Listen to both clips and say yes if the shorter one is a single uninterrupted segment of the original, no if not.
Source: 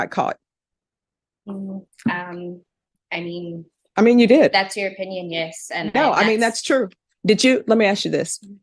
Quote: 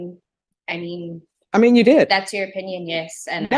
yes